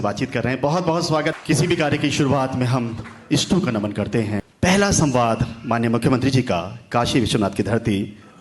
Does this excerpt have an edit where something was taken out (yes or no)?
yes